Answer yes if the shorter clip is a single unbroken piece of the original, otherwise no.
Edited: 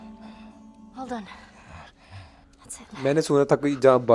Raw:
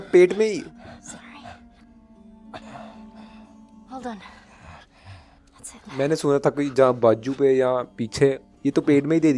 yes